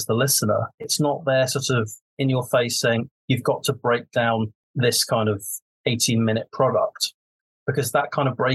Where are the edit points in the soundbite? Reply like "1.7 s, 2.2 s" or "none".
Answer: 0.9 s, 2.0 s, 4.6 s